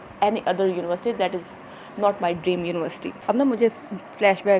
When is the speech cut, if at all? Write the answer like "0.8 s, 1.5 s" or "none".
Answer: 3.2 s